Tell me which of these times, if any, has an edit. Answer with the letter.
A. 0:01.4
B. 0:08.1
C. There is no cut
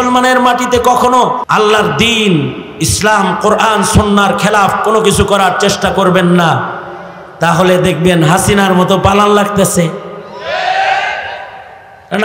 A